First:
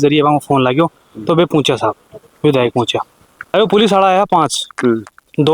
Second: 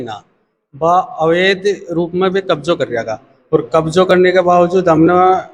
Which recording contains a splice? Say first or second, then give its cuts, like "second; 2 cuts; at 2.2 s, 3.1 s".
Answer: first; 1 cut; at 3.5 s